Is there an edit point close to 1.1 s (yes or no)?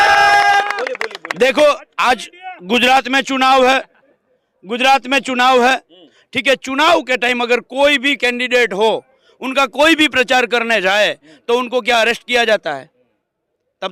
no